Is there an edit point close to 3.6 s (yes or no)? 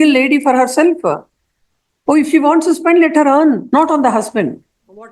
yes